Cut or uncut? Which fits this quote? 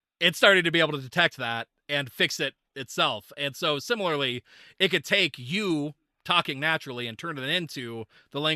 uncut